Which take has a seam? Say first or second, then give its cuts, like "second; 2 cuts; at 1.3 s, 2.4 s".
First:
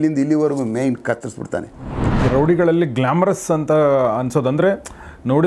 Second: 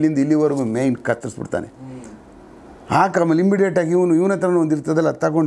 first; 1 cut; at 2.2 s